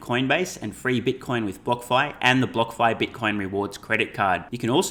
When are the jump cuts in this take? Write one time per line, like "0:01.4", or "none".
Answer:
none